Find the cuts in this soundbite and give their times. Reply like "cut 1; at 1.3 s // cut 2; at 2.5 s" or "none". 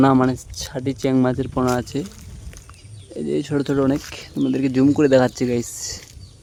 none